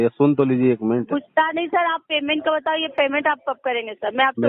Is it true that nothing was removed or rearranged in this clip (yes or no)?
yes